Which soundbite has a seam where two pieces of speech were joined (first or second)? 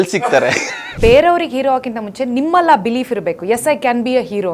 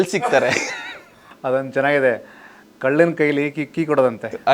first